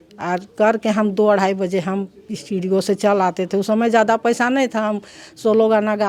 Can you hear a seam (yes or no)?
no